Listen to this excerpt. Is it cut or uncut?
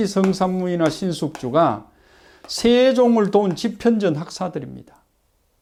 uncut